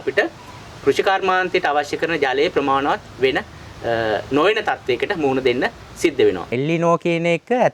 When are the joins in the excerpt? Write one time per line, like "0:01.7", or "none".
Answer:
0:06.5